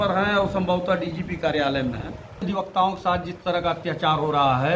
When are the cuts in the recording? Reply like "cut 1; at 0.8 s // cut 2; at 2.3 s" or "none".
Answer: cut 1; at 2.4 s